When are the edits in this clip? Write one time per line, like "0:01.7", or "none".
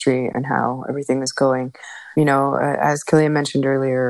0:02.1